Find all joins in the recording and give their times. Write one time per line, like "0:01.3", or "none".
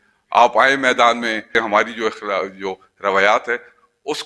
0:01.5